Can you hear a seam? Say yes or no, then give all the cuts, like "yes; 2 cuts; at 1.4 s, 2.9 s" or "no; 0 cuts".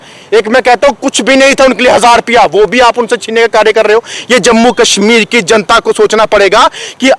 no; 0 cuts